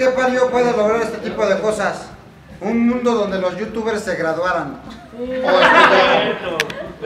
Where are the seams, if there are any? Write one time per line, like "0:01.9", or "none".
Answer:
none